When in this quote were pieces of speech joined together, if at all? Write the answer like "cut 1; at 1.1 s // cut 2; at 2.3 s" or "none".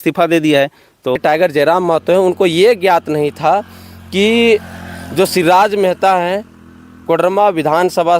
cut 1; at 1.2 s